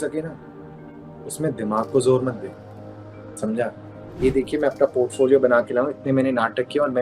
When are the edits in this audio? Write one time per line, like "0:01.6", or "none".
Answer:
0:04.2